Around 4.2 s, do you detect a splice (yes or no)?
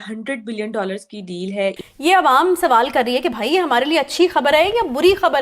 no